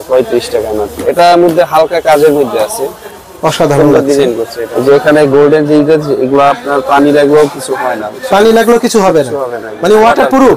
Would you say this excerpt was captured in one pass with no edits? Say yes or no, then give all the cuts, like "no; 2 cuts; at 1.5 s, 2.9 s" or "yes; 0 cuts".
no; 2 cuts; at 1.0 s, 4.6 s